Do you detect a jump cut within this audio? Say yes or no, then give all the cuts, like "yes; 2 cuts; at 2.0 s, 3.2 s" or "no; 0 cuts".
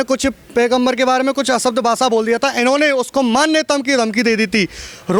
no; 0 cuts